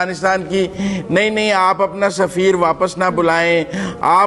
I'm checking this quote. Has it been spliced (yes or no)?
no